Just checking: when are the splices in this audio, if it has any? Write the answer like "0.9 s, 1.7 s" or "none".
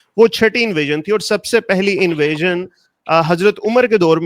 none